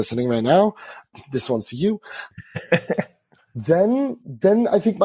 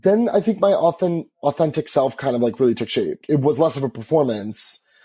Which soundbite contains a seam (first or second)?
second